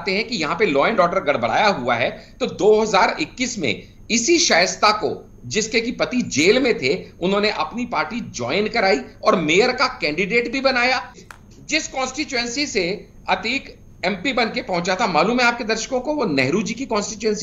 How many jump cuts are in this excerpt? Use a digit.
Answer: 1